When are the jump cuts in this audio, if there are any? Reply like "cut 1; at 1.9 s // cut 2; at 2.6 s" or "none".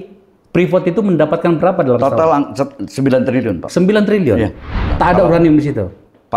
cut 1; at 4.8 s

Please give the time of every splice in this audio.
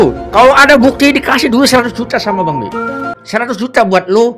cut 1; at 3.1 s

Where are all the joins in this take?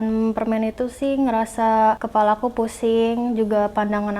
cut 1; at 2.0 s

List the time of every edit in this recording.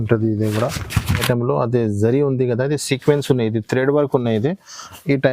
cut 1; at 1.2 s

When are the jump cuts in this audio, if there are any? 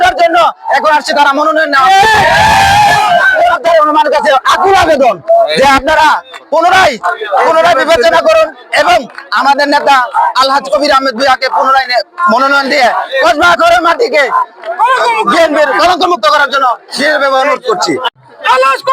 none

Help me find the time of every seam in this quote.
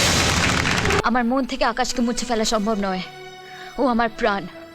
cut 1; at 1.0 s

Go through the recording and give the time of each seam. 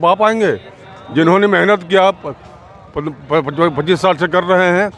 none

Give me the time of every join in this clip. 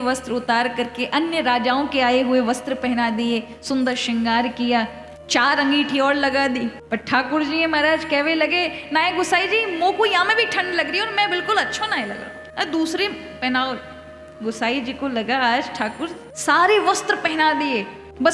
none

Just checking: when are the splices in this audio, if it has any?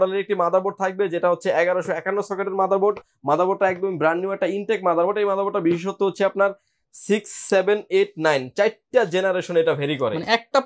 none

